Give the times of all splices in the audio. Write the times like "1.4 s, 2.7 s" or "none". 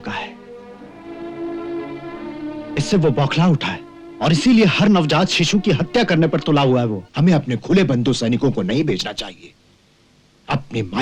7.0 s